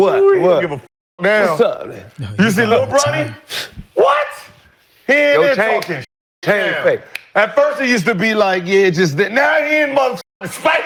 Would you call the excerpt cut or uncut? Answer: uncut